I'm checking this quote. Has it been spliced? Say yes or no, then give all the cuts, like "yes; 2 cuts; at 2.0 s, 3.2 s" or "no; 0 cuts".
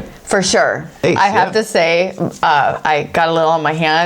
yes; 1 cut; at 1.0 s